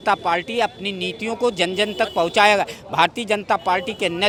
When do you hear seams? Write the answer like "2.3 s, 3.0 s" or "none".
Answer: none